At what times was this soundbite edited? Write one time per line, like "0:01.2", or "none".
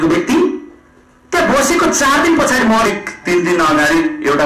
0:02.9